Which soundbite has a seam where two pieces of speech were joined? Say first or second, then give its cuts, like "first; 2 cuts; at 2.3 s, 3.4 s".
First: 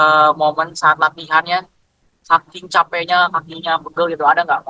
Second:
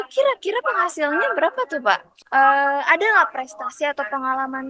second; 1 cut; at 2.1 s